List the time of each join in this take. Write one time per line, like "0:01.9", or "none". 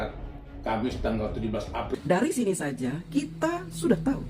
0:01.9